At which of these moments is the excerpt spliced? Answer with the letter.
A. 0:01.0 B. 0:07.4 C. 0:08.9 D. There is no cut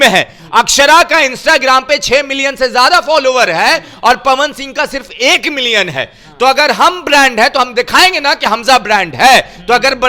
D